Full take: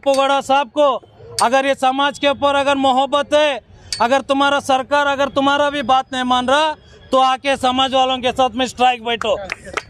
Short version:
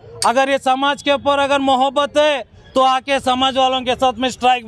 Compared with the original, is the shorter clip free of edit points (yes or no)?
no